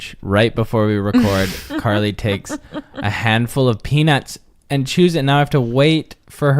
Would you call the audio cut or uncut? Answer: cut